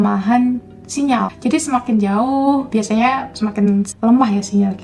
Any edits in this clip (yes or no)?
yes